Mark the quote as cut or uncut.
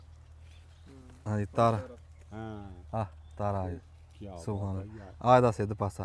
uncut